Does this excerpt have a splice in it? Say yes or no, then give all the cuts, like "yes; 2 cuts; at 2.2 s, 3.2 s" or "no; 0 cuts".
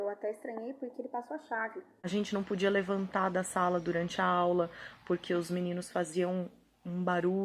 yes; 1 cut; at 1.9 s